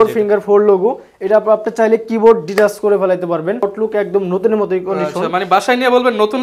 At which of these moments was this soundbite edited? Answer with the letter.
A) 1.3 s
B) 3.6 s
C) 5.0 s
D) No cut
B